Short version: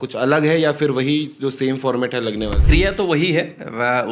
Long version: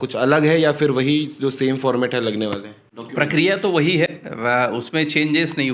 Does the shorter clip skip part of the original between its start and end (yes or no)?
yes